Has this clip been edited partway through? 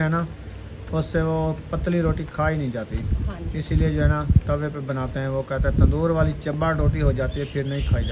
no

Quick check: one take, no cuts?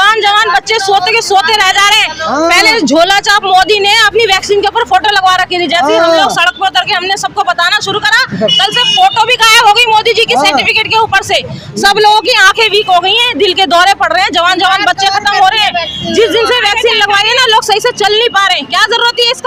yes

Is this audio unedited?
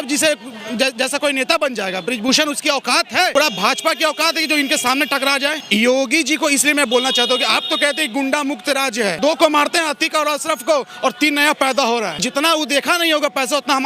no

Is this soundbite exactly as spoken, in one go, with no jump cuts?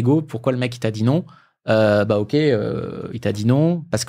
yes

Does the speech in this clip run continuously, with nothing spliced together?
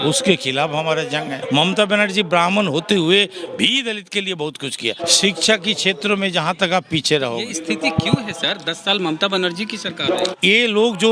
no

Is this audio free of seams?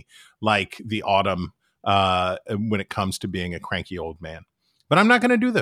yes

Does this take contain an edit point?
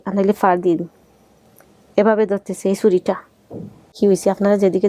yes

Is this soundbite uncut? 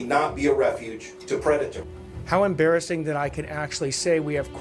no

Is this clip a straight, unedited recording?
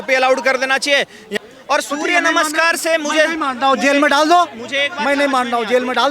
no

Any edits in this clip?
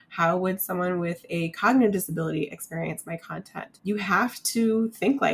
yes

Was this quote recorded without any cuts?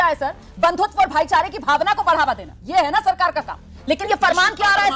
no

